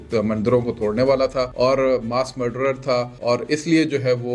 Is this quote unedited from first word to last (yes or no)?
no